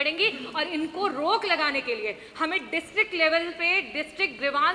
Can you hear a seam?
no; 0 cuts

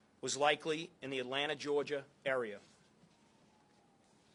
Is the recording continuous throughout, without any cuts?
yes; 0 cuts

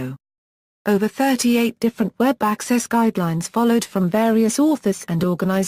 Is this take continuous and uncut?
no; 1 cut; at 4.1 s

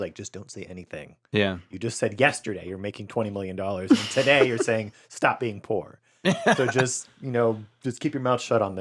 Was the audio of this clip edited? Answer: no; 0 cuts

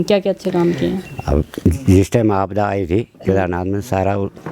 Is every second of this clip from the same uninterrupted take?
yes; 0 cuts

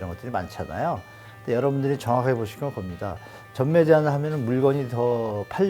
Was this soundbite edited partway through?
no; 0 cuts

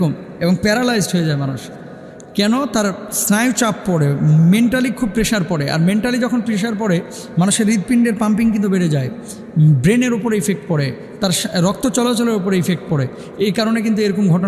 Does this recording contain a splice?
no; 0 cuts

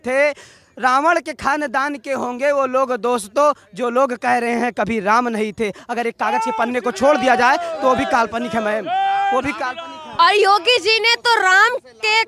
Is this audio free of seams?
yes; 0 cuts

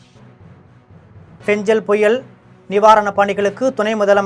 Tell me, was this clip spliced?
yes; 1 cut; at 1.0 s

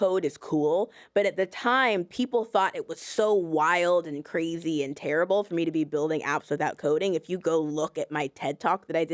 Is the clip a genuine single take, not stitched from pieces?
yes; 0 cuts

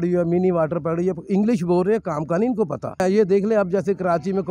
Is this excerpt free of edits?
no; 1 cut; at 3.0 s

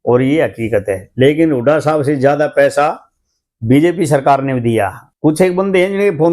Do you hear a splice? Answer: yes; 1 cut; at 5.0 s

